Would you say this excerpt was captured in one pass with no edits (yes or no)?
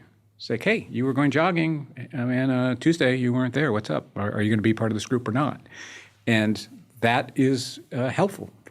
yes